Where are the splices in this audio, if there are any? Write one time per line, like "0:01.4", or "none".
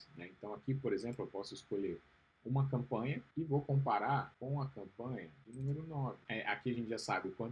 0:03.3
0:04.3
0:05.4
0:06.2